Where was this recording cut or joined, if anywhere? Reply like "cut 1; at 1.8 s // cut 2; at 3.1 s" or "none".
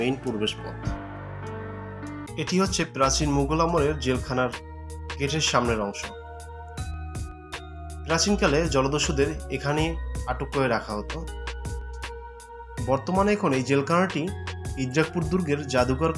cut 1; at 2.3 s